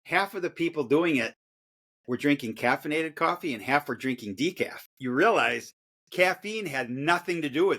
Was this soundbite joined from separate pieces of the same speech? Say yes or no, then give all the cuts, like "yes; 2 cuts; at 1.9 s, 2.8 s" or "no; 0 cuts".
no; 0 cuts